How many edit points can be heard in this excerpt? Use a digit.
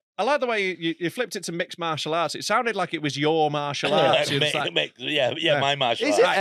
0